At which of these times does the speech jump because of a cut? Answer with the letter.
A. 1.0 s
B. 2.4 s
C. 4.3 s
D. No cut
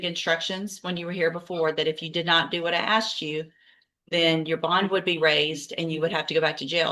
D